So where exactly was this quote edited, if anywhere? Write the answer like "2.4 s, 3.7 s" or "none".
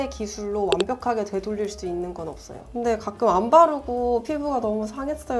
none